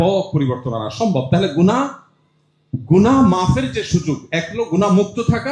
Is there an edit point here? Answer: no; 0 cuts

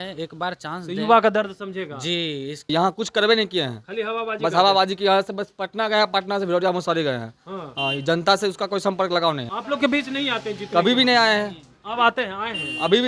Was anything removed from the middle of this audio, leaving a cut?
yes; 2 cuts; at 2.6 s, 9.5 s

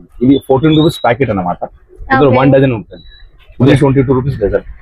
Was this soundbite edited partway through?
yes; 1 cut; at 3.7 s

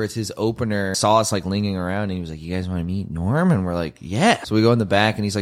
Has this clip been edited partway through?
yes; 2 cuts; at 1.0 s, 4.4 s

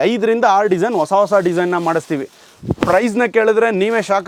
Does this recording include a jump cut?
no; 0 cuts

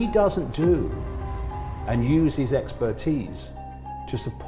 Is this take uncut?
yes; 0 cuts

